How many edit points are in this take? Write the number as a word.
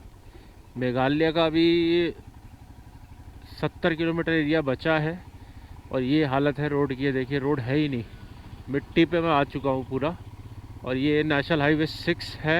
zero